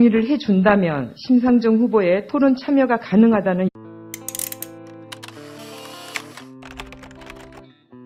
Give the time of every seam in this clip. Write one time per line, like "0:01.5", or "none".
none